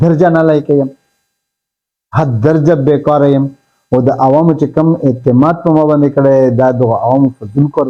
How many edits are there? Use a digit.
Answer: 0